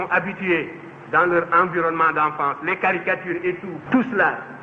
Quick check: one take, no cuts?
no; 1 cut; at 3.7 s

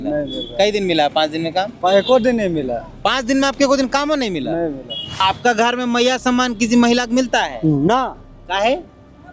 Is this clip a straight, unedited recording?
no; 1 cut; at 5.2 s

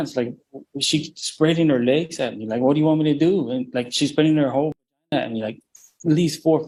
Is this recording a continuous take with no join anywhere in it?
yes; 0 cuts

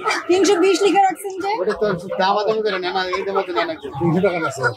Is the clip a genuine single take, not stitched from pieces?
yes; 0 cuts

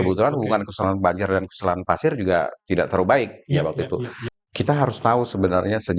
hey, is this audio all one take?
no; 1 cut; at 4.3 s

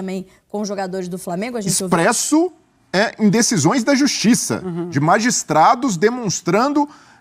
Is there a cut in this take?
yes; 1 cut; at 1.8 s

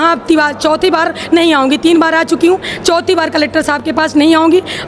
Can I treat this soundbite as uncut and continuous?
yes; 0 cuts

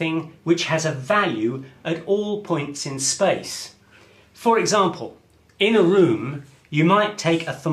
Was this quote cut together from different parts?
no; 0 cuts

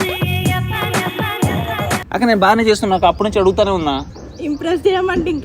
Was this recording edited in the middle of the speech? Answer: yes; 1 cut; at 2.0 s

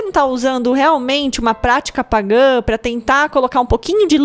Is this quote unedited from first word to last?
yes; 0 cuts

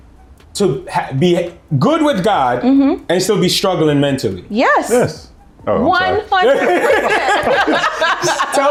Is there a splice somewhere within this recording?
no; 0 cuts

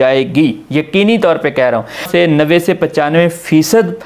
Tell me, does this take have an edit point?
yes; 1 cut; at 2.1 s

